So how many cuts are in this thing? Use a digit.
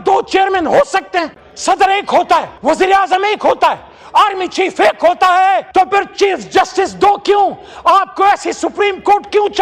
0